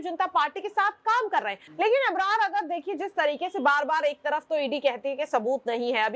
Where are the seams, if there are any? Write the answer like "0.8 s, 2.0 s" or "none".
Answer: 1.6 s